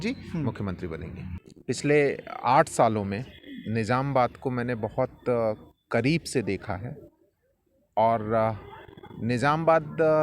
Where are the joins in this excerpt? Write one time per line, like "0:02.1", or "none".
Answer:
0:01.2